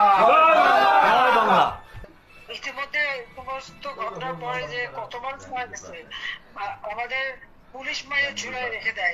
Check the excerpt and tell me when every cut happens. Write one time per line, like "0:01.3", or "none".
0:02.0